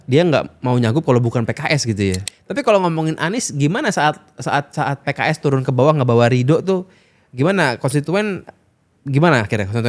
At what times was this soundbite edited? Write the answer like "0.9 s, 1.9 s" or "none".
2.3 s